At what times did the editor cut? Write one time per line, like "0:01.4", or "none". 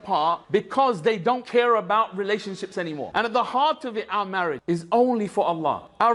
0:03.1